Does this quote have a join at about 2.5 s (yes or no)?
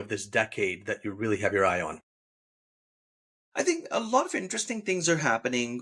no